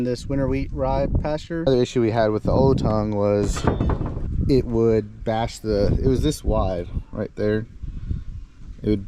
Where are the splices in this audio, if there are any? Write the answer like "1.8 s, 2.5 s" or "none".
1.6 s